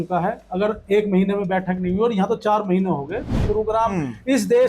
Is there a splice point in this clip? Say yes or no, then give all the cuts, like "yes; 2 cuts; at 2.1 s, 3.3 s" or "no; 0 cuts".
yes; 1 cut; at 3.5 s